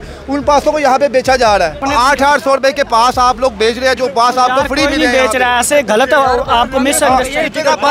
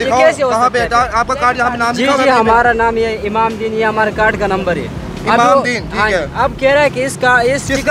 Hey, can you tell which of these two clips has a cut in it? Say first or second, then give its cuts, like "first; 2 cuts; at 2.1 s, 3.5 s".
first; 1 cut; at 1.9 s